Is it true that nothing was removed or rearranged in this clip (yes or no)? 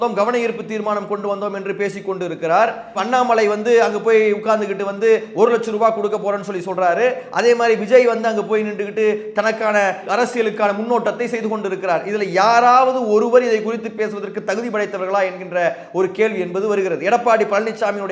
yes